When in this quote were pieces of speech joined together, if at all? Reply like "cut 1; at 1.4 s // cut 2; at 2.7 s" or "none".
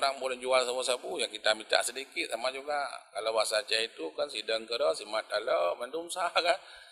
none